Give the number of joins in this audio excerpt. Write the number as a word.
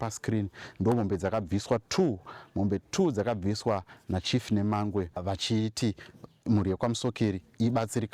one